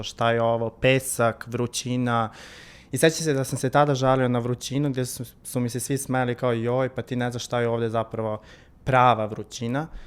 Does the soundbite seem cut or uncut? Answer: uncut